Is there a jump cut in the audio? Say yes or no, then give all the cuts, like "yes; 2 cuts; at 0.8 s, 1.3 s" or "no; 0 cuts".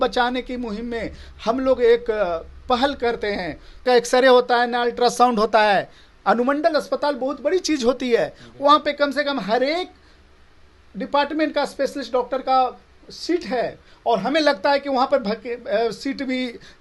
yes; 1 cut; at 3.8 s